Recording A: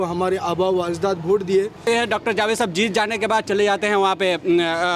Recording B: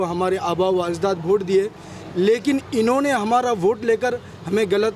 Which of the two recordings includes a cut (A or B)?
A